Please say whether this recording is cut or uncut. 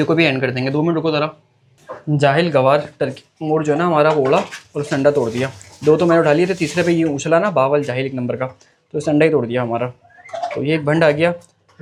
uncut